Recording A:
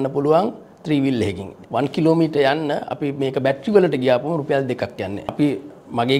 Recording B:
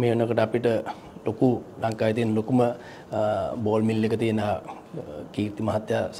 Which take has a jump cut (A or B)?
A